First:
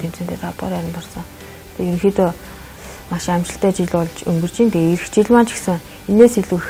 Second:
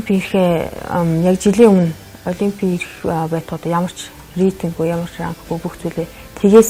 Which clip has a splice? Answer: second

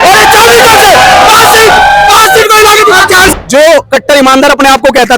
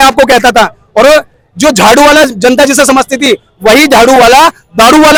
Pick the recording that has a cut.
first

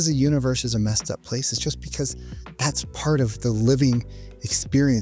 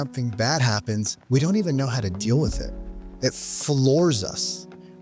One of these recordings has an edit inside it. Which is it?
second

